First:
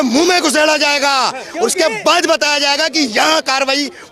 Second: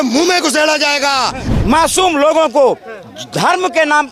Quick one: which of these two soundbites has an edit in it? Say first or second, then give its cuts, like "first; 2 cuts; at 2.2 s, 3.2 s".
second; 1 cut; at 1.4 s